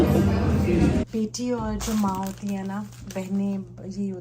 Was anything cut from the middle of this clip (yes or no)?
yes